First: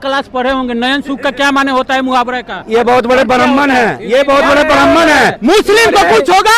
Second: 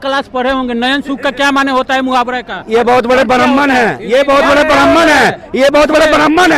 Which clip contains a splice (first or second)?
first